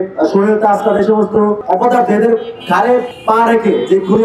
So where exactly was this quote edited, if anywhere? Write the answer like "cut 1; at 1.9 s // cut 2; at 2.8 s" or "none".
cut 1; at 1.6 s // cut 2; at 3.1 s